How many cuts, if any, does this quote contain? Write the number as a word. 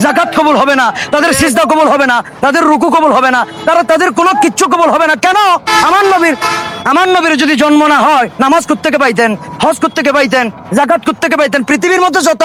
zero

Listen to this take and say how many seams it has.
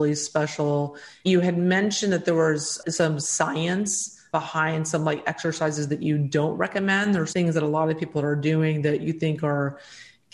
three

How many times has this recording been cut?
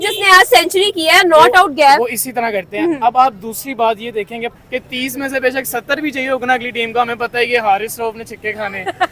one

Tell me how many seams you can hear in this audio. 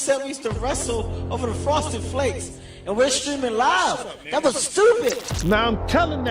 one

